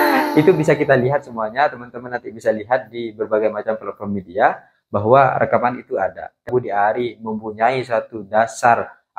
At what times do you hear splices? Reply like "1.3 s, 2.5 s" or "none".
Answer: 6.5 s